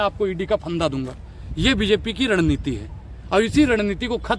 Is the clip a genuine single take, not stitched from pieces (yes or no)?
yes